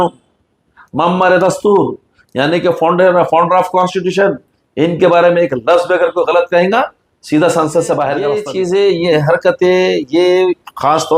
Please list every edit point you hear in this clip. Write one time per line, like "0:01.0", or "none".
0:08.4